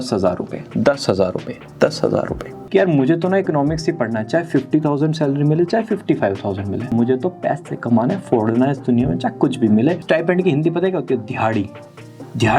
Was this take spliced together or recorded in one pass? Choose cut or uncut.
cut